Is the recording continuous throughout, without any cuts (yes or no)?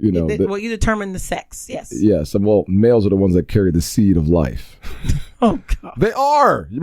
yes